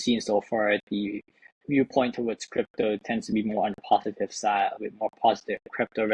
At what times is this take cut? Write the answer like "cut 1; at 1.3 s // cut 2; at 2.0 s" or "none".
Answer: none